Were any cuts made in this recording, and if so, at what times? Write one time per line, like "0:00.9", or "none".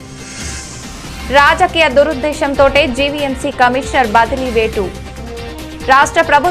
0:01.3